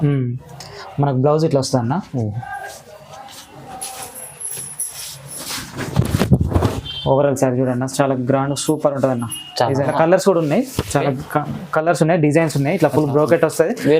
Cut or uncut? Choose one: cut